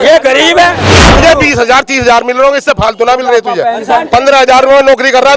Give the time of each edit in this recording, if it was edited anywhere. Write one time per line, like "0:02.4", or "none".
0:00.9